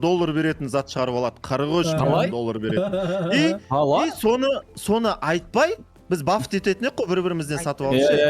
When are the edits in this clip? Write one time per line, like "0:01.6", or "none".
0:05.9

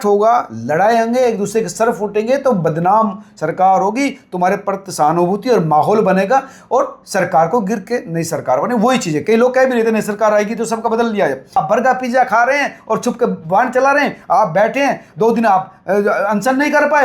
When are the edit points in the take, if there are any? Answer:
0:11.6

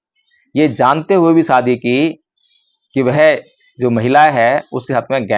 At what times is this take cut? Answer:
none

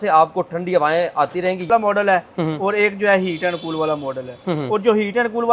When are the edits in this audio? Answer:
0:01.7

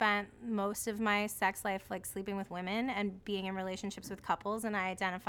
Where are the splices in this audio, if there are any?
none

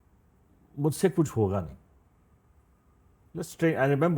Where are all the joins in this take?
none

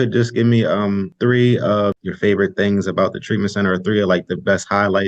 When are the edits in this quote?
0:01.1
0:02.0

